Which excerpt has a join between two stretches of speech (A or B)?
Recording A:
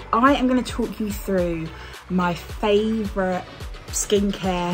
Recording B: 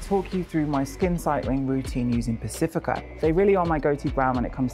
B